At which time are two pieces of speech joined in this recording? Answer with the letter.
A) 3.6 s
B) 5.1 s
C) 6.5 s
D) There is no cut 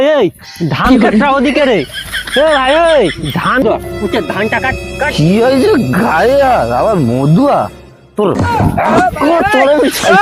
A